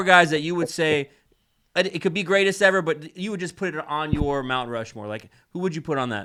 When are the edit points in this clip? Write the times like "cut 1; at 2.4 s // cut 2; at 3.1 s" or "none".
none